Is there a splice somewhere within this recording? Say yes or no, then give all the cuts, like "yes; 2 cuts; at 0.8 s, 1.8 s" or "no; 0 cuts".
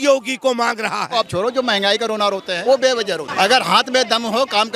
yes; 3 cuts; at 1.2 s, 2.5 s, 3.3 s